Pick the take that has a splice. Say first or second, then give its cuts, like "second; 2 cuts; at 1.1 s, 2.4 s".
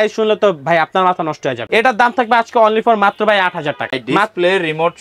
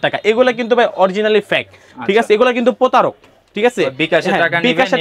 first; 2 cuts; at 1.6 s, 4.0 s